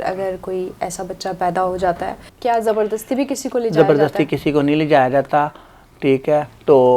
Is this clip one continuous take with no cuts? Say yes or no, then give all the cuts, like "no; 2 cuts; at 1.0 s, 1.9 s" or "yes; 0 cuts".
no; 1 cut; at 2.3 s